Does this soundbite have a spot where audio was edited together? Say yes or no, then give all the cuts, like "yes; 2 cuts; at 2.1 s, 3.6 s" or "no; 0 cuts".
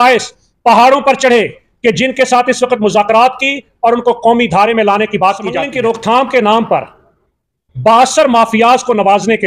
yes; 1 cut; at 5.7 s